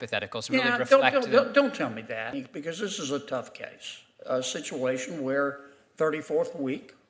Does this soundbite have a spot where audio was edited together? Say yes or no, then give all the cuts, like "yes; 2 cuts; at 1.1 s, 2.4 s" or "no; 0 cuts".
yes; 1 cut; at 2.3 s